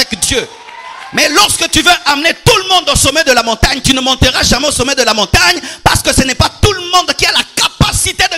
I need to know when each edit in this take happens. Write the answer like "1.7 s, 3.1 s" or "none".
none